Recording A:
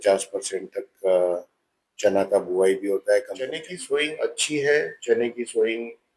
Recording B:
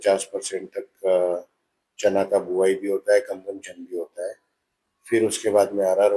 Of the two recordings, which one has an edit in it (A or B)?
A